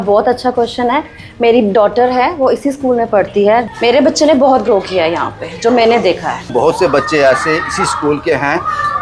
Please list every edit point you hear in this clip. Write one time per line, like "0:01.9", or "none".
0:03.7
0:06.5

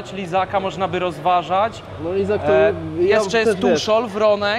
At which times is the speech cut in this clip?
none

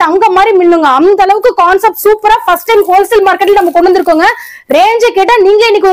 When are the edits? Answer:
none

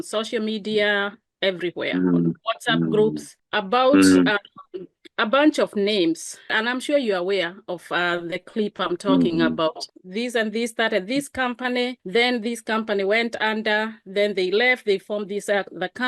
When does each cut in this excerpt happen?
0:06.5
0:09.8

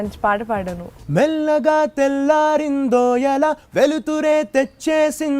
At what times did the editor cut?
0:00.9

